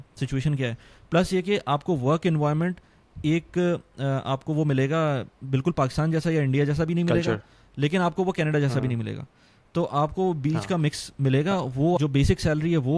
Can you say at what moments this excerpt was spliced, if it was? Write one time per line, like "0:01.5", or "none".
0:12.0